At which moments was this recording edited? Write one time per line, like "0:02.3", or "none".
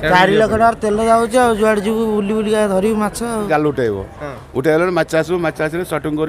0:03.5